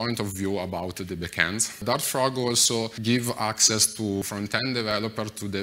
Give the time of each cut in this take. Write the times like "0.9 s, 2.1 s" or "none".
1.8 s, 2.9 s, 4.2 s